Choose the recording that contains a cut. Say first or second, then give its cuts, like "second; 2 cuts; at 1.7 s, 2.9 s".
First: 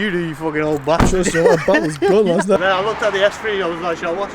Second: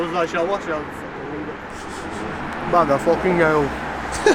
first; 1 cut; at 2.6 s